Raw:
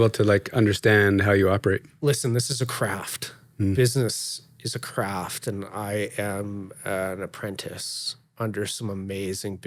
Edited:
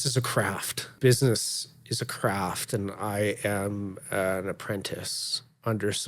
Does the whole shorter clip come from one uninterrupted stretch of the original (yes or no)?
no